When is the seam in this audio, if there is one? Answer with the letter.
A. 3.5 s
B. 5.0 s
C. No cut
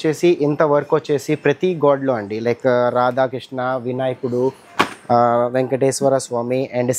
C